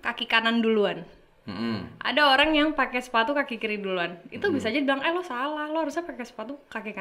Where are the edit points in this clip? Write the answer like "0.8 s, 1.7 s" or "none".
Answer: none

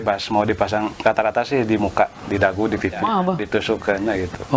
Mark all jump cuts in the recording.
3.0 s

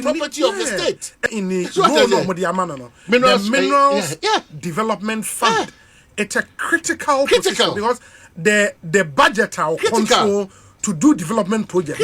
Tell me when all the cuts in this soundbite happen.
1.2 s

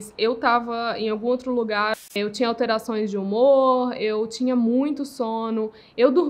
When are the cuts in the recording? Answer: 2.2 s

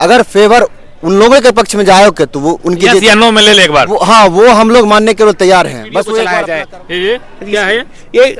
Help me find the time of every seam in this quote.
6.3 s

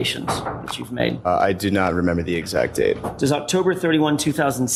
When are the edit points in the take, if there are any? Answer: none

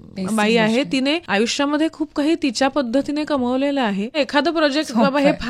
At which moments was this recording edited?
1.2 s, 4.2 s

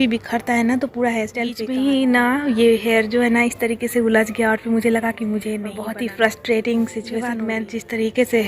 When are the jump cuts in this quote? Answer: 1.6 s, 5.7 s, 7.3 s

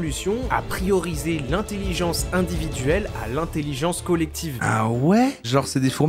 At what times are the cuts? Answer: 4.6 s

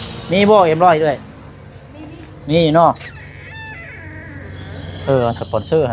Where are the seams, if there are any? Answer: none

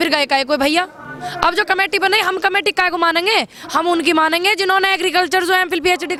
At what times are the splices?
none

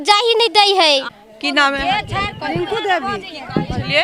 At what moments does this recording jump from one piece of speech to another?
1.2 s

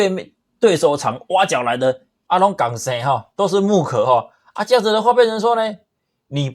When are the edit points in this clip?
2.1 s

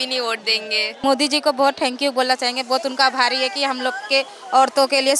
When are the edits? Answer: 1.0 s

